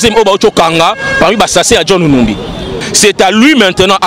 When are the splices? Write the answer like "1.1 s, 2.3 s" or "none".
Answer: 2.8 s